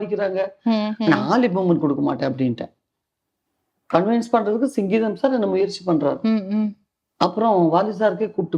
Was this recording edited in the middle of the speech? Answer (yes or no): no